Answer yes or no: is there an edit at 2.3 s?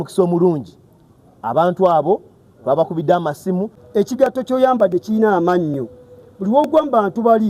no